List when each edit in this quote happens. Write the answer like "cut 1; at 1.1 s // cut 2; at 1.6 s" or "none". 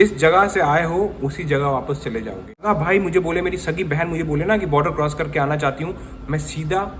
cut 1; at 2.6 s

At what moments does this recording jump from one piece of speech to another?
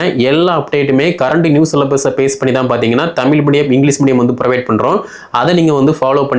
none

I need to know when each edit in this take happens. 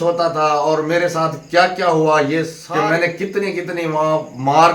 cut 1; at 2.6 s

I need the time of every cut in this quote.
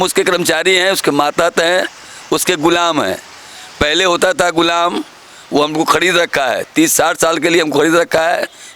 none

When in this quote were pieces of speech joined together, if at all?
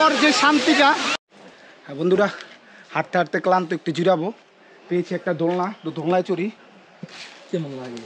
cut 1; at 1.1 s

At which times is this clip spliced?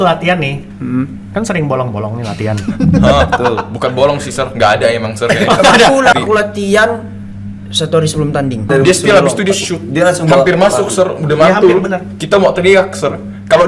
cut 1; at 6.1 s // cut 2; at 8.7 s

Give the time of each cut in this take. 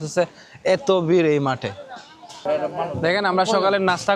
cut 1; at 2.3 s

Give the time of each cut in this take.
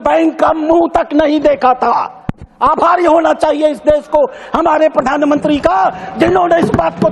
none

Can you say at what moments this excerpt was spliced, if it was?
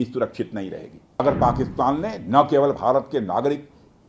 cut 1; at 1.2 s

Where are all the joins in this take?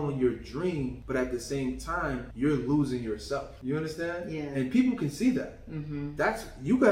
cut 1; at 1.0 s // cut 2; at 2.3 s // cut 3; at 3.5 s

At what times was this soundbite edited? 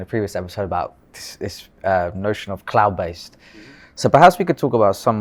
none

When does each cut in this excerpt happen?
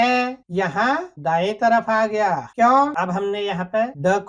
cut 1; at 2.9 s

